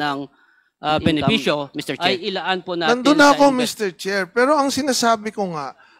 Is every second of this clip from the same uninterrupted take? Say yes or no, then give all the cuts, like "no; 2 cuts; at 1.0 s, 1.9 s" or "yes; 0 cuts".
no; 1 cut; at 2.9 s